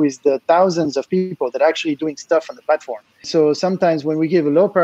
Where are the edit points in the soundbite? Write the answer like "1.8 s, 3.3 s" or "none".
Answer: 3.2 s